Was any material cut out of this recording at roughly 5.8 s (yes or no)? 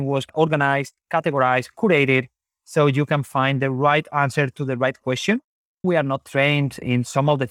yes